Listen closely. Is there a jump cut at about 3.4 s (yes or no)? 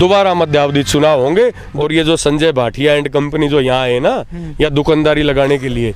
no